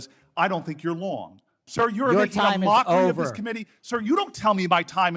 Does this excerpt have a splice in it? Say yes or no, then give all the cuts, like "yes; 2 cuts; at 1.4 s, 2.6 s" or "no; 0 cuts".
yes; 1 cut; at 1.6 s